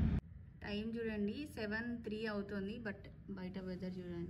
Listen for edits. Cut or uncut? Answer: uncut